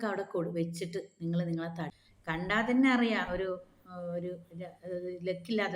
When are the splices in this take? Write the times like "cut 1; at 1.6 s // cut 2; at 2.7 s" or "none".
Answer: cut 1; at 1.9 s